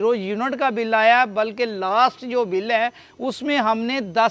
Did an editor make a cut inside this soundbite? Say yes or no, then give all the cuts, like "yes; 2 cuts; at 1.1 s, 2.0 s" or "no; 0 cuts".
no; 0 cuts